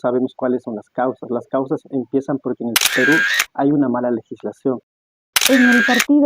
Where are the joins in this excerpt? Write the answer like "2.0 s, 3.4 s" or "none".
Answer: 4.8 s